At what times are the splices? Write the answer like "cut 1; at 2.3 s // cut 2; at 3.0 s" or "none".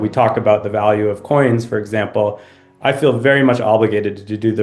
none